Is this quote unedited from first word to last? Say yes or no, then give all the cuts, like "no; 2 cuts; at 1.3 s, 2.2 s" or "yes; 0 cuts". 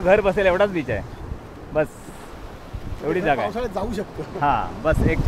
yes; 0 cuts